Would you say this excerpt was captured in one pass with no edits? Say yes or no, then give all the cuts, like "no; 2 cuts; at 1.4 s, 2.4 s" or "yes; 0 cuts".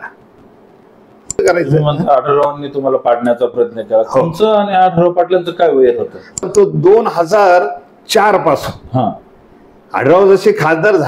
no; 2 cuts; at 1.4 s, 6.4 s